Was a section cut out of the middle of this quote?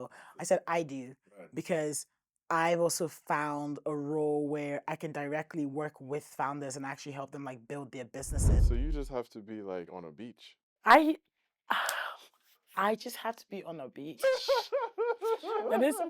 yes; 1 cut; at 8.6 s

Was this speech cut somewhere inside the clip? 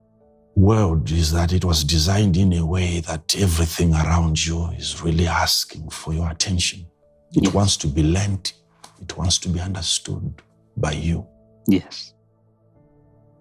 no; 0 cuts

